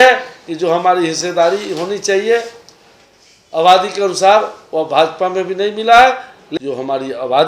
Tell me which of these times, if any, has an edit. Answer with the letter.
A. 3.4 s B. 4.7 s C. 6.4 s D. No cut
C